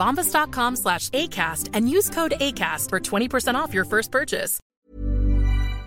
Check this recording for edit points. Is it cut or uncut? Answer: cut